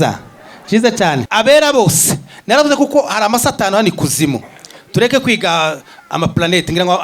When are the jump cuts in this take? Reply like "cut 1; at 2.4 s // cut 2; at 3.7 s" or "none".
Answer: cut 1; at 1.2 s